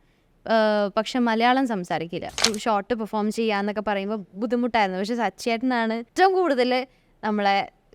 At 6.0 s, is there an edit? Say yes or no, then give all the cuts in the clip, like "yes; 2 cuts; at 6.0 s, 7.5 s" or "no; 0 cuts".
yes; 2 cuts; at 2.5 s, 6.0 s